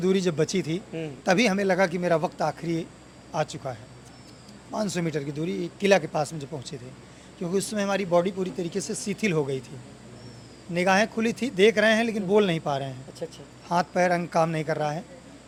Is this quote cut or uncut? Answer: uncut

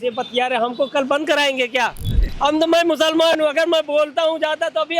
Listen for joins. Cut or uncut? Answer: cut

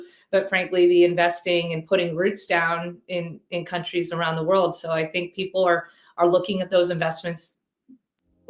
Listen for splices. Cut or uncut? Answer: uncut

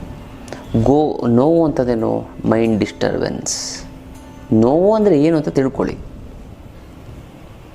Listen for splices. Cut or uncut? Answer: uncut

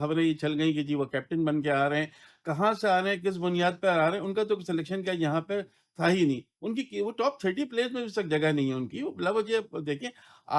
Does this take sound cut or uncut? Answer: uncut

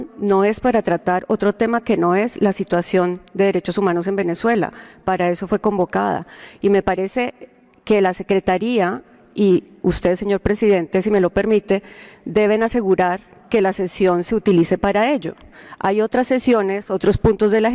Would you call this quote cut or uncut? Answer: uncut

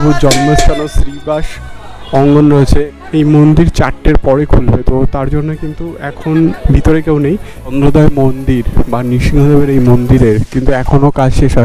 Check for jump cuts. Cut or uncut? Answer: cut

